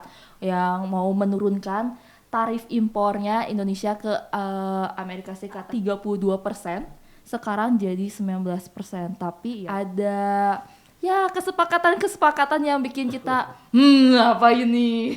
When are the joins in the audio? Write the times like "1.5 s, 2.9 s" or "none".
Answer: 5.6 s, 9.6 s